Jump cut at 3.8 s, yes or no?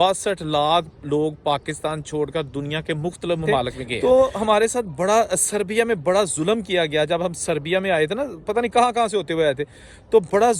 yes